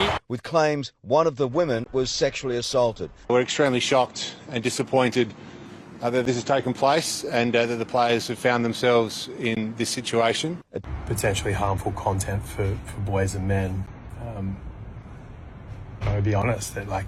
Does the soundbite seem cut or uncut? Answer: cut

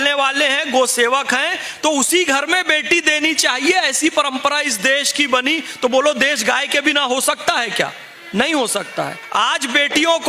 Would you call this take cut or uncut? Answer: uncut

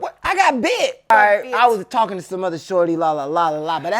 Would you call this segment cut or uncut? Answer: cut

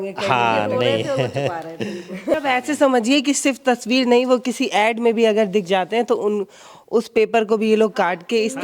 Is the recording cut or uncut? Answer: cut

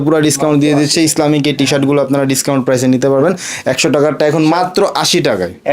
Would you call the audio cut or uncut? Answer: uncut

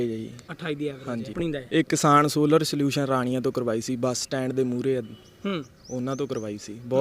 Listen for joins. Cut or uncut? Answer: cut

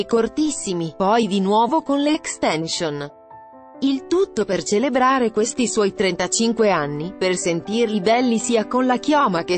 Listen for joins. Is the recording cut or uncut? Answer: uncut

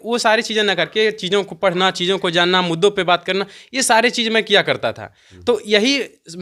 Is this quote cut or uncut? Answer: uncut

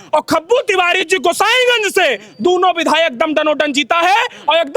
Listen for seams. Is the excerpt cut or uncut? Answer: uncut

